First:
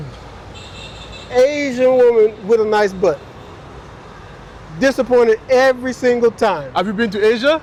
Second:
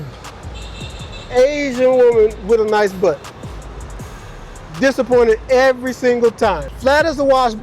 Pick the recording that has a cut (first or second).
second